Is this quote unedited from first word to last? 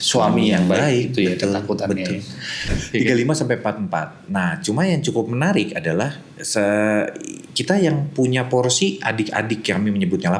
no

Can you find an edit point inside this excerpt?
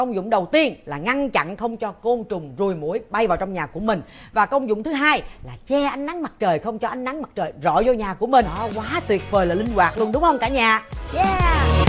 yes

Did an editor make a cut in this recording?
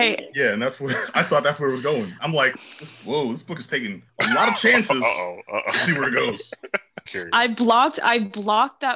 yes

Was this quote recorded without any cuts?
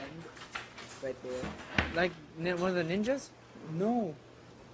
yes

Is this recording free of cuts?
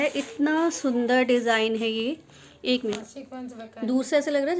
no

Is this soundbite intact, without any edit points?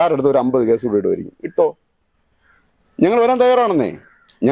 yes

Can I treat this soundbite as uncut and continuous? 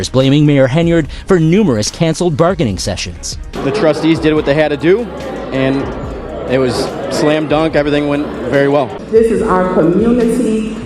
no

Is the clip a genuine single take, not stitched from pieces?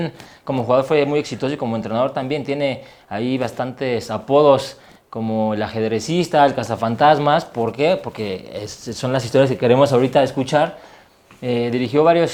yes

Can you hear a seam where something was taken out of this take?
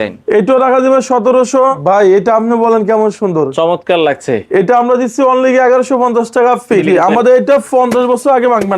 yes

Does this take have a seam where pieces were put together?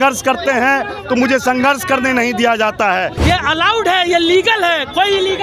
yes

